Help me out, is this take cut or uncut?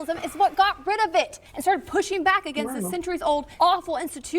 cut